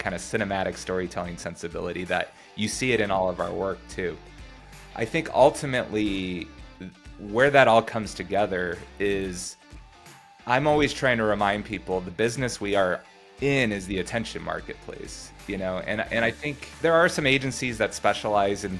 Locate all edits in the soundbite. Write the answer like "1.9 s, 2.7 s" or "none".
16.7 s